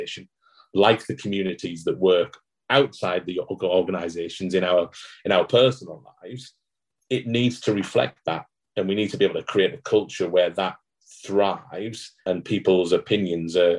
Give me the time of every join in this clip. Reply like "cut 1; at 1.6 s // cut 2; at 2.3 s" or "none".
cut 1; at 12.1 s